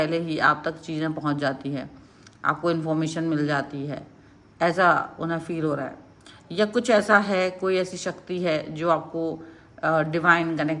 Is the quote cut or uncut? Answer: uncut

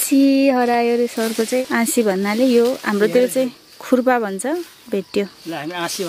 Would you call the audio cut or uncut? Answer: cut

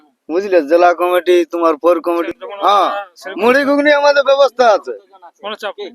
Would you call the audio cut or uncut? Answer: cut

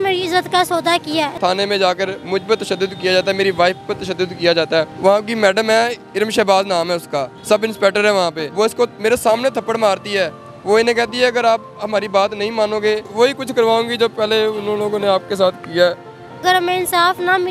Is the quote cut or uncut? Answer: cut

